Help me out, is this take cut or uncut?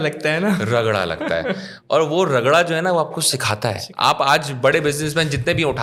uncut